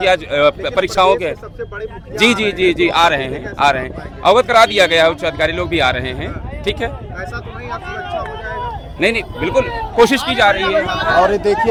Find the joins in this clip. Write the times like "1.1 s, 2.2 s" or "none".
none